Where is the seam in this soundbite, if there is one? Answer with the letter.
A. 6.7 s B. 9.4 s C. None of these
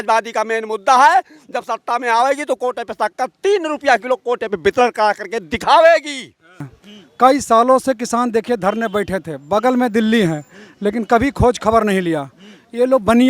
A